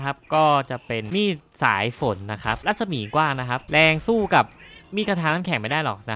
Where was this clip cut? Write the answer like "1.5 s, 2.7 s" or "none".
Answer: 1.0 s, 2.6 s, 3.6 s

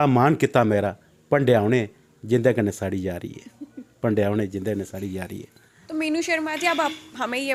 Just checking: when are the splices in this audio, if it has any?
none

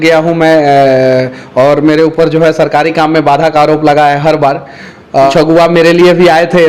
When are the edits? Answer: 5.3 s

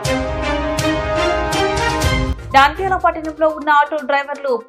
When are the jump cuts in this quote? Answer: none

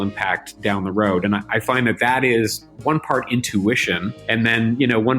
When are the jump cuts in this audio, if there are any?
2.7 s, 4.1 s

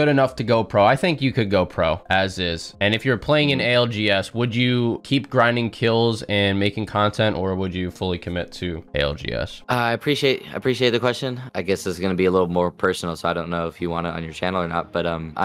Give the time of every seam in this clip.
none

